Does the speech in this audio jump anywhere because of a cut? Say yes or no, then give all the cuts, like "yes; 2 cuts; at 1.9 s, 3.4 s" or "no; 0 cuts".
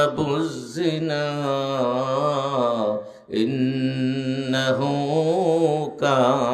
no; 0 cuts